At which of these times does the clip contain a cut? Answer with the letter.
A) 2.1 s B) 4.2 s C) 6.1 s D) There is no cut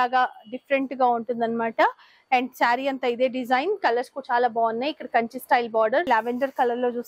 C